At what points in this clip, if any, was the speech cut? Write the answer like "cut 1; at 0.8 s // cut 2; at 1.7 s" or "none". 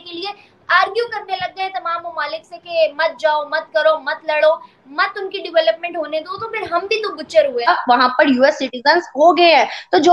cut 1; at 7.7 s